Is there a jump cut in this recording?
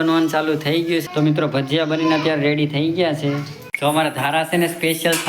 yes; 2 cuts; at 1.0 s, 3.7 s

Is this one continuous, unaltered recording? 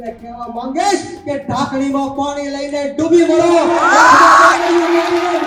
yes; 0 cuts

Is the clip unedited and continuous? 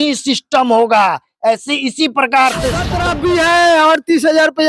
no; 1 cut; at 3.0 s

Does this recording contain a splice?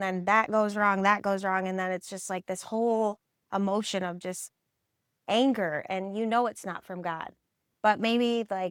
no; 0 cuts

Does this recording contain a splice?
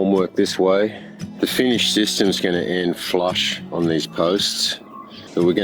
no; 0 cuts

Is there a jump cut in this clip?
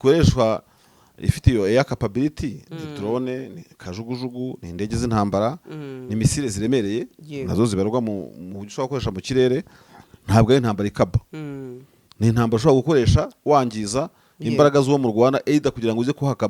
no; 0 cuts

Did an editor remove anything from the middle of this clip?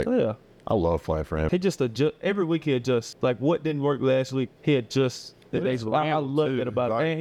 yes; 2 cuts; at 1.5 s, 3.1 s

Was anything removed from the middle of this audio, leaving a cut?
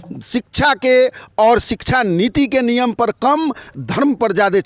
no; 0 cuts

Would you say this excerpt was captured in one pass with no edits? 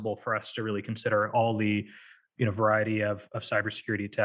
yes; 0 cuts

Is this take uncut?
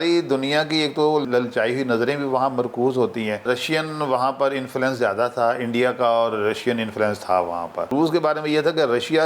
no; 3 cuts; at 1.2 s, 3.4 s, 7.9 s

